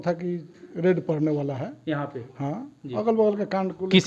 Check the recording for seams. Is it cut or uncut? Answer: uncut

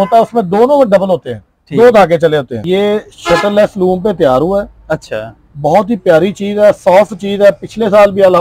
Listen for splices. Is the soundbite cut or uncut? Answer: cut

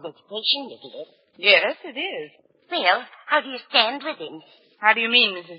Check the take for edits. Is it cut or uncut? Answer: uncut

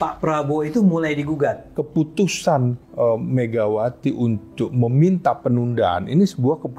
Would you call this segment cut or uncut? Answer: cut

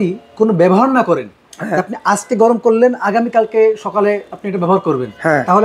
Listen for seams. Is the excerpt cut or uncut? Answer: uncut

